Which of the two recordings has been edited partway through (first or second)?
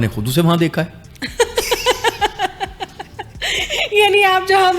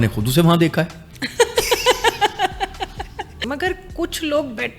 second